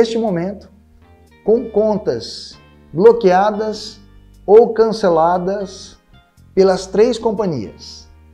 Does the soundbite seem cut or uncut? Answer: uncut